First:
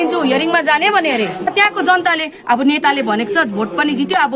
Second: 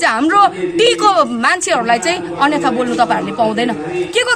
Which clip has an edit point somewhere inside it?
first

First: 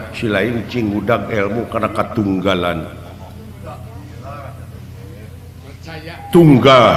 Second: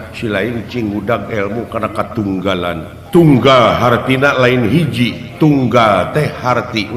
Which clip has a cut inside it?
second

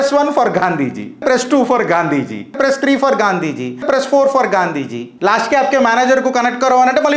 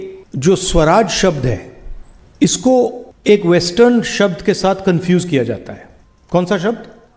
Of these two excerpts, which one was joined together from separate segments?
first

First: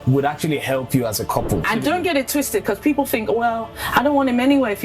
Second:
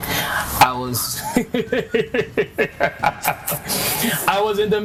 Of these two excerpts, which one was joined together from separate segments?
first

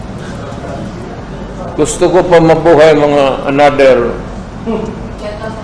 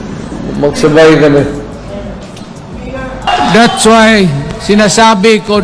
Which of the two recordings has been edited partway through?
second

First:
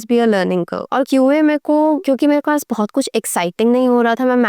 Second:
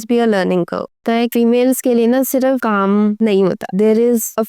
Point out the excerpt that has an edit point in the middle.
second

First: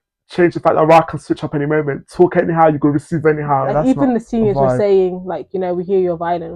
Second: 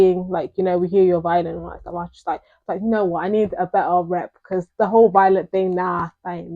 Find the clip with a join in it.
first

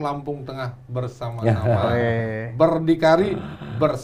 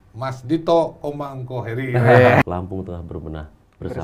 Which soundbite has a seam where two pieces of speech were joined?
second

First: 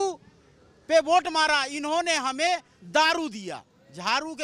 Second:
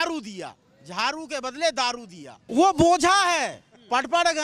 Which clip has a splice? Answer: second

